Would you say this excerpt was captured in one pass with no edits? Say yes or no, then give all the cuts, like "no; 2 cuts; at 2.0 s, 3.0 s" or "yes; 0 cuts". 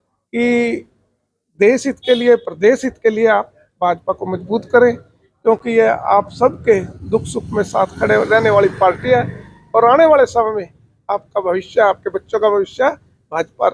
yes; 0 cuts